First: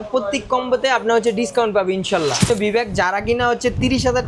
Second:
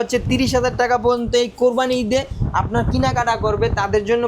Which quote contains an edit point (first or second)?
first